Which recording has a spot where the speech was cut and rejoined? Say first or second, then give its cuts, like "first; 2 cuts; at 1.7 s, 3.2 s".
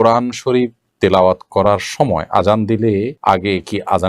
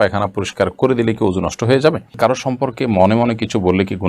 second; 1 cut; at 2.1 s